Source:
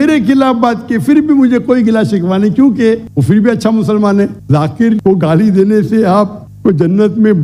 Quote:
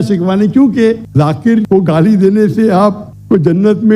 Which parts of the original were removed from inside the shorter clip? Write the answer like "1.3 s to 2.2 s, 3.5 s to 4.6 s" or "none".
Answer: 3.1 s to 4.4 s